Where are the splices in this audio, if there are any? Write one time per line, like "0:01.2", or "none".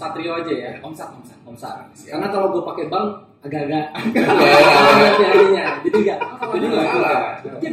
0:06.4